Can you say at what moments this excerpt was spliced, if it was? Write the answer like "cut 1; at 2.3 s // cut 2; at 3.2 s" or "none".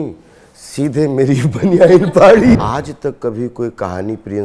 cut 1; at 2.6 s